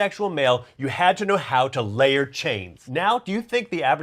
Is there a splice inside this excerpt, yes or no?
yes